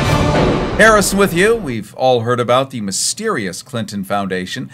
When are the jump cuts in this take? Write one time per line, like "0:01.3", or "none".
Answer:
0:02.2